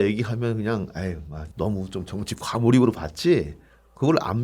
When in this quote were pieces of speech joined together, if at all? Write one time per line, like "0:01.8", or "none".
0:01.4